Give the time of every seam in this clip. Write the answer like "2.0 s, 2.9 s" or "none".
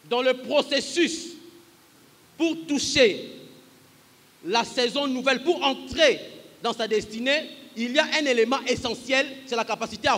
none